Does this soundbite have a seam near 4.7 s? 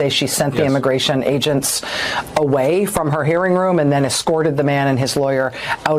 yes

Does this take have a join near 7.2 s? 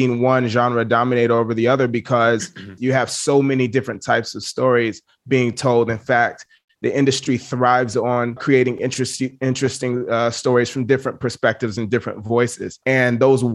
no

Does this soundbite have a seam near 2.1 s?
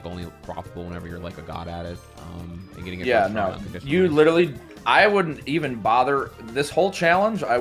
no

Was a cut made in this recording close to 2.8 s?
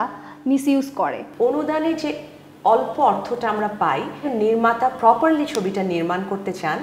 no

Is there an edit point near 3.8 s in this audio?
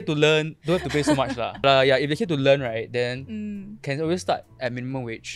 no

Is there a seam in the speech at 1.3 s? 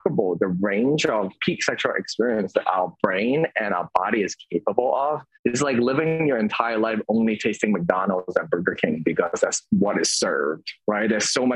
yes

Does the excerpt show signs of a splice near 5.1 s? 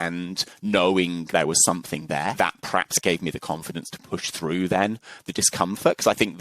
no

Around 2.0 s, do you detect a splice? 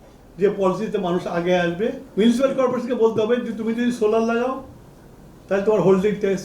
yes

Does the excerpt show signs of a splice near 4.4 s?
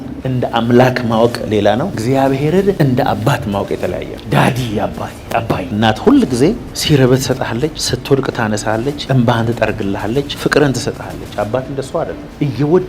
no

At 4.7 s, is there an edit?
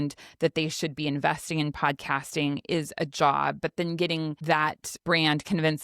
yes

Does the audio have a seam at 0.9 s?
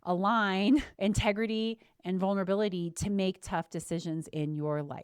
yes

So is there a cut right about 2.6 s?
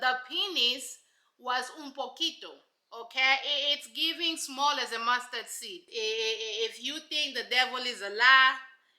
no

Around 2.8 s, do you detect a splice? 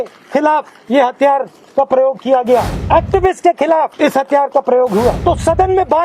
yes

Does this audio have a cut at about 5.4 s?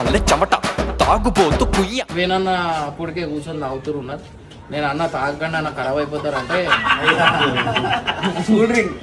no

